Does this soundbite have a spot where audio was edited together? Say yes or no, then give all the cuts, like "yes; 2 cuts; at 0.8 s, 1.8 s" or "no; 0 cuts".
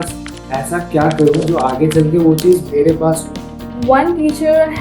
yes; 1 cut; at 3.7 s